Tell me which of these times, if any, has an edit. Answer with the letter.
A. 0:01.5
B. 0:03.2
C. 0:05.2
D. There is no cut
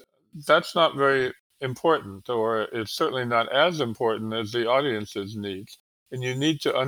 A